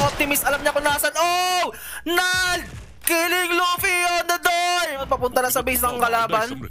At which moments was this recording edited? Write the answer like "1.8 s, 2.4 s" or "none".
5.0 s